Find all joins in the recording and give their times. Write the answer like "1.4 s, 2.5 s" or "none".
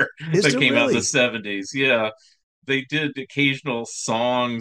none